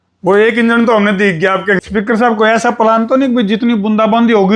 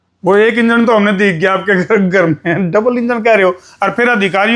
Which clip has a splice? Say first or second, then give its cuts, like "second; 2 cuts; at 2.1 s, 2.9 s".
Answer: first; 1 cut; at 1.8 s